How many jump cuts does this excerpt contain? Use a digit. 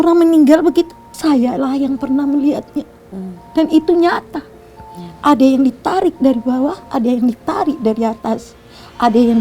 1